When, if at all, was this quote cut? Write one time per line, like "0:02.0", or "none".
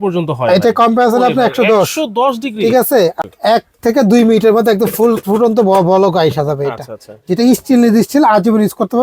0:03.2